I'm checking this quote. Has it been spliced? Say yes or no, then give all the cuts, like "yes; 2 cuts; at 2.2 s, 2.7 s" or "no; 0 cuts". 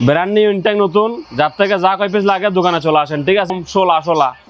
yes; 1 cut; at 3.5 s